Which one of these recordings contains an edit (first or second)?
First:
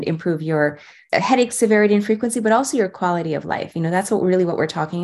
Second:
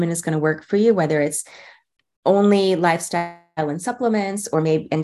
first